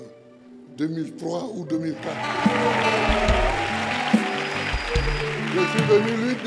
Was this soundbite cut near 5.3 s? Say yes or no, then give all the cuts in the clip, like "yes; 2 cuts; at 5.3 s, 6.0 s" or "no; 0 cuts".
no; 1 cut; at 2.2 s